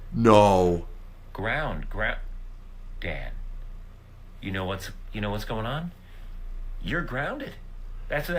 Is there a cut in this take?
no; 0 cuts

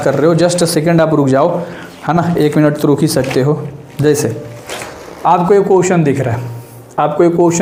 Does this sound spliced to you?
no; 0 cuts

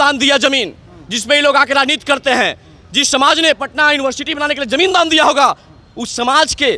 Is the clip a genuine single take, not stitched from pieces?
yes; 0 cuts

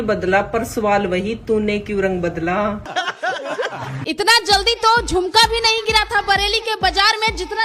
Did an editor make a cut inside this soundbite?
yes; 2 cuts; at 2.9 s, 4.0 s

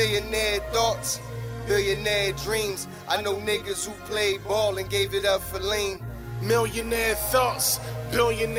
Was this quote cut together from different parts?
no; 0 cuts

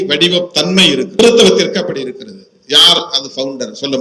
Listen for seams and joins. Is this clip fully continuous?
no; 1 cut; at 1.2 s

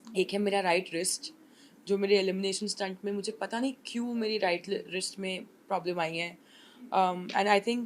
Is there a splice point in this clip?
no; 0 cuts

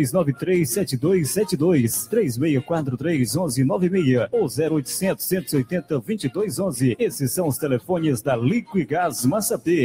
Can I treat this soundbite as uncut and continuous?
yes; 0 cuts

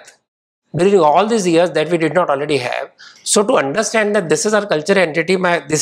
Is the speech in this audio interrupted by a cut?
no; 0 cuts

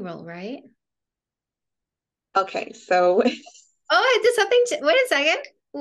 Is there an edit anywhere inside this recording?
no; 0 cuts

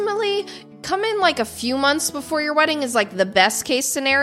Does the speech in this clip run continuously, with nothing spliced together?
yes; 0 cuts

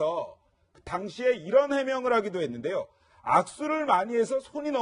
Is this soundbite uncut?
yes; 0 cuts

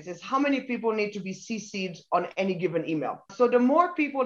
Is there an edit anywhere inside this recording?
no; 0 cuts

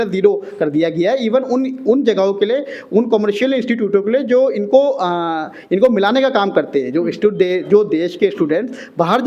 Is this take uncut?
yes; 0 cuts

